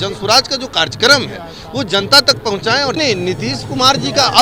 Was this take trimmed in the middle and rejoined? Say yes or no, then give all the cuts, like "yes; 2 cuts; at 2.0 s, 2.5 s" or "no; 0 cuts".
yes; 1 cut; at 3.0 s